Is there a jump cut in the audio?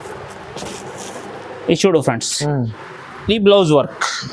yes; 1 cut; at 2.7 s

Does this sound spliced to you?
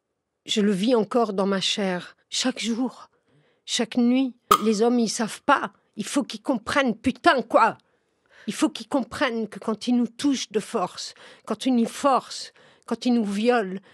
yes; 1 cut; at 4.6 s

